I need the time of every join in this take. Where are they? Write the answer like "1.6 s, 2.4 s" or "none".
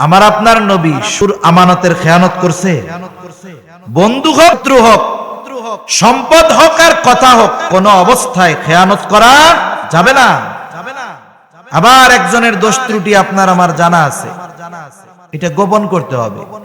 1.2 s, 4.6 s